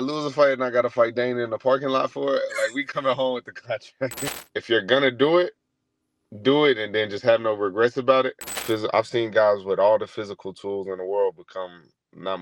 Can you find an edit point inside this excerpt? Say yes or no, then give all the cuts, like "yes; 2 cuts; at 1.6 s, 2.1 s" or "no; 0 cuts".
yes; 2 cuts; at 4.3 s, 8.6 s